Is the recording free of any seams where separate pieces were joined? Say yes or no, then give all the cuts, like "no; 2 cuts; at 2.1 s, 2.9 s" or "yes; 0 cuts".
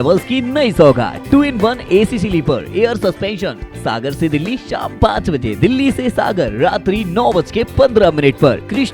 yes; 0 cuts